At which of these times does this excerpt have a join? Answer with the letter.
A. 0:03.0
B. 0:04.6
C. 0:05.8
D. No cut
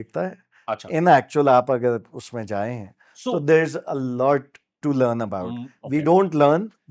D